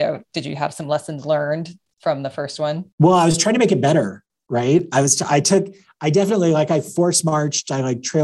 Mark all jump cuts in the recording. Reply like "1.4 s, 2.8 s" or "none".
2.9 s